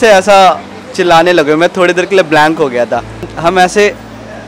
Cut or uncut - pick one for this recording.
cut